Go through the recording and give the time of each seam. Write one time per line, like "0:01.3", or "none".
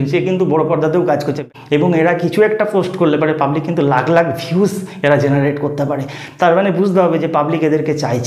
0:01.4